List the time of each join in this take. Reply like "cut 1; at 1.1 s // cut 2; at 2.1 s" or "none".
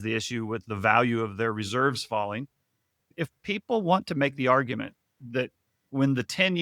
cut 1; at 3.1 s